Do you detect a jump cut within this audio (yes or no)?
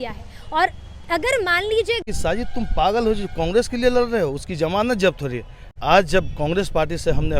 yes